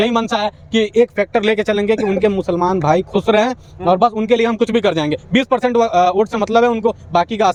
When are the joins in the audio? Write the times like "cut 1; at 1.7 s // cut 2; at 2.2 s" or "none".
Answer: none

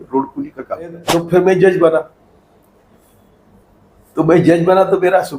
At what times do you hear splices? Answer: cut 1; at 1.0 s

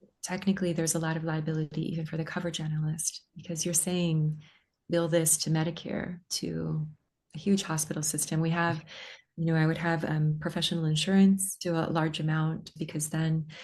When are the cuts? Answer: cut 1; at 11.5 s // cut 2; at 12.7 s

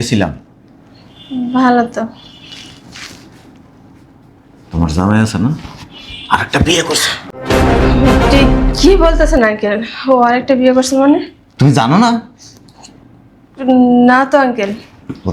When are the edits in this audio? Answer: none

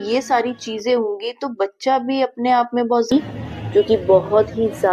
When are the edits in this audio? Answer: cut 1; at 3.1 s

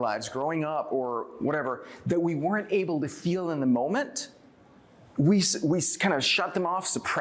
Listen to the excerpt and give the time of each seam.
none

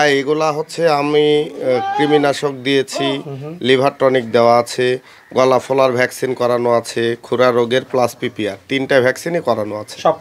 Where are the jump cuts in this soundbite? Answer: none

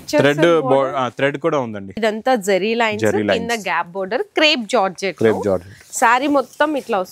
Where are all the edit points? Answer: cut 1; at 1.9 s

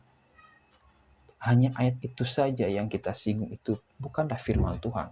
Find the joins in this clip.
none

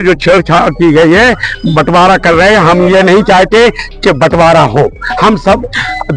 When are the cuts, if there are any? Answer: none

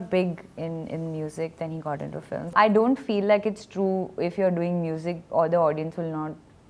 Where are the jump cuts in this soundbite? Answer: cut 1; at 2.5 s

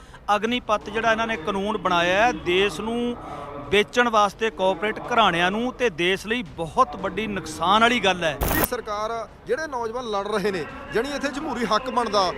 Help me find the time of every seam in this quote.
cut 1; at 8.6 s

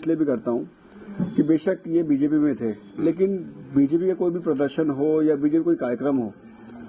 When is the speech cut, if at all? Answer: none

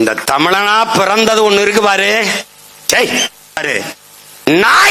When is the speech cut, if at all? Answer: cut 1; at 3.6 s

